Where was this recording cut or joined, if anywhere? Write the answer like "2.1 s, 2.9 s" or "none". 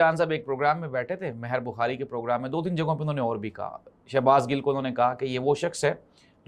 none